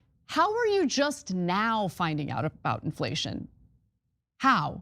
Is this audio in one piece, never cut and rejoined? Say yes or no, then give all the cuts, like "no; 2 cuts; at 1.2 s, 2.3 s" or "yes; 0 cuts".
no; 1 cut; at 3.9 s